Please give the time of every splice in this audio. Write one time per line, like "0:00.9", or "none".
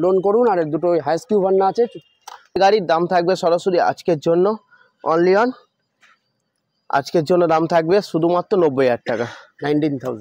0:02.5